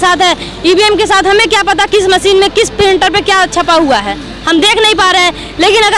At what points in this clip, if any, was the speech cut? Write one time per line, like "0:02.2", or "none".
none